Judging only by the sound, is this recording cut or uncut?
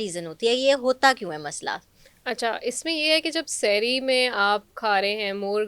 uncut